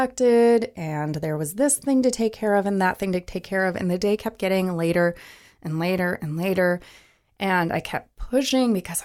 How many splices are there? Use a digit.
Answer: 0